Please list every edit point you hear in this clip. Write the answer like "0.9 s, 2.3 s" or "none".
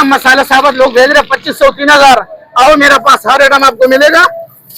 none